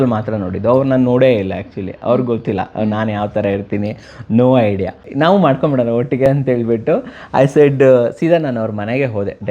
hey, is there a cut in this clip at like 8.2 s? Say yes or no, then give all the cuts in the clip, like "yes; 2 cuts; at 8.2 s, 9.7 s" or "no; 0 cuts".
no; 1 cut; at 5.1 s